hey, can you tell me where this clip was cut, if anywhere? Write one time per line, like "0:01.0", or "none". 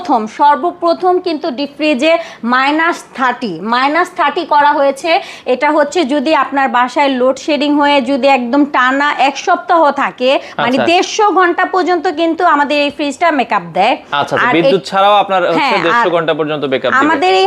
none